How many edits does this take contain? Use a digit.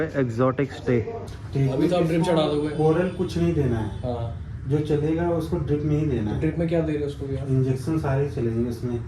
1